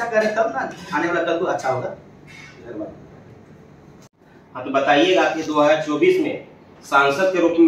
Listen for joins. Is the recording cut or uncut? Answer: uncut